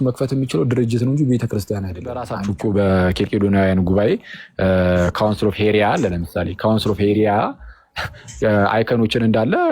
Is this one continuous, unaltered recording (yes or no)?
no